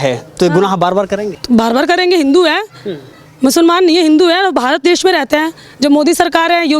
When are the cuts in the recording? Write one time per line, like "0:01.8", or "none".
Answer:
0:01.3